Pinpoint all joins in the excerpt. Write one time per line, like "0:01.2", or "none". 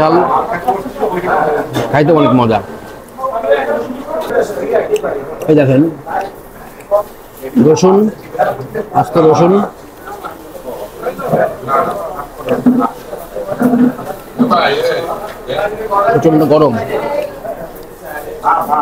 0:04.3